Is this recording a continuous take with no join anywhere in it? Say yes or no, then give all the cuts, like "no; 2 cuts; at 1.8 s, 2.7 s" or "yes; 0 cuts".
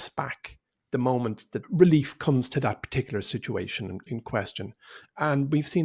no; 1 cut; at 1.5 s